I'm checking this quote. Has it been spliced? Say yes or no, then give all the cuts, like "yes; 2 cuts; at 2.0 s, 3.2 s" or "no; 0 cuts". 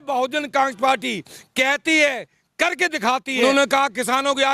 yes; 1 cut; at 3.4 s